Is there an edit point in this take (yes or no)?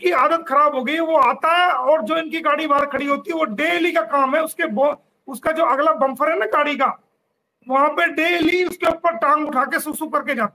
no